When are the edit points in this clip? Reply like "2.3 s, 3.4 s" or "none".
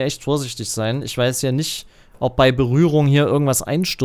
none